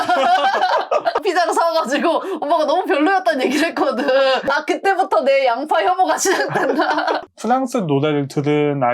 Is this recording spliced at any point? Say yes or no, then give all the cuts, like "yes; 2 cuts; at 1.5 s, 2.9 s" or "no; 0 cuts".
yes; 3 cuts; at 1.2 s, 4.5 s, 7.2 s